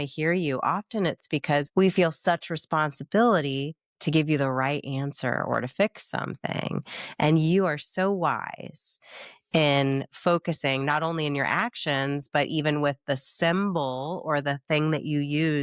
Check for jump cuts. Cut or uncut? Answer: cut